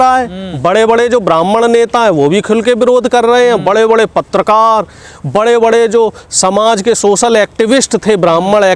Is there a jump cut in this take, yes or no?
no